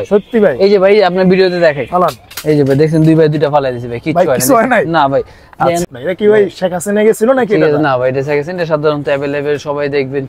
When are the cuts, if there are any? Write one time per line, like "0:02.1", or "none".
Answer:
0:05.8